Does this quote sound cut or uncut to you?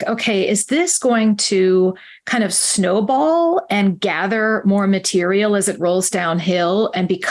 uncut